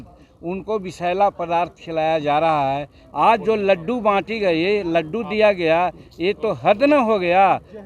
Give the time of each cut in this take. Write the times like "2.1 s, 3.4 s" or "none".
3.0 s